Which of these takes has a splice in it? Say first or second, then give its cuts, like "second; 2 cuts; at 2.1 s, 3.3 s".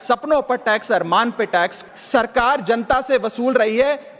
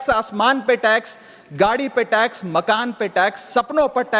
first; 1 cut; at 1.8 s